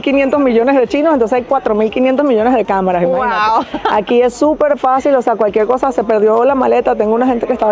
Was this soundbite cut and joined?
no; 0 cuts

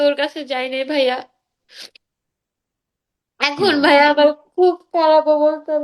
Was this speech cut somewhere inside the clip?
no; 0 cuts

